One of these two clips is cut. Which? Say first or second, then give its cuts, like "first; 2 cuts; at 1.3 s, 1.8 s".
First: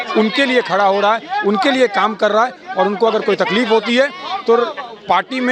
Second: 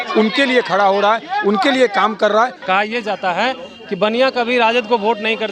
second; 1 cut; at 2.6 s